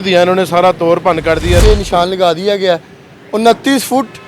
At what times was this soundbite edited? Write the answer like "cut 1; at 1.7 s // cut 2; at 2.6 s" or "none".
cut 1; at 1.6 s